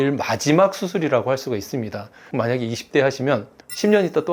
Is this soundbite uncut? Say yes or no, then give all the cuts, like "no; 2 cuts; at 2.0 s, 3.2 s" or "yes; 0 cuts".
no; 1 cut; at 2.2 s